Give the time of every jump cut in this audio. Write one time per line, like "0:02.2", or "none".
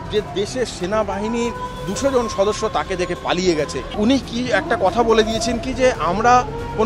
0:03.9

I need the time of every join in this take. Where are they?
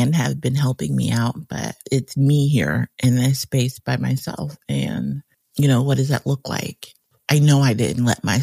0:01.8
0:07.1

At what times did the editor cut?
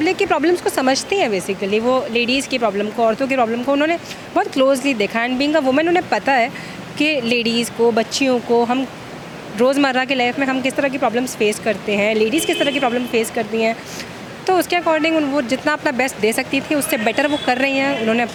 none

